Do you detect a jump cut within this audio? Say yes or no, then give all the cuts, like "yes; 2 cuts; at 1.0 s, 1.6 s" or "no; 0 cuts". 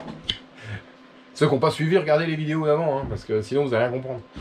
no; 0 cuts